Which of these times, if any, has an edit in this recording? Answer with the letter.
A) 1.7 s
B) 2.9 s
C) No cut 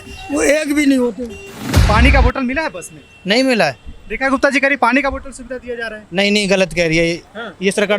A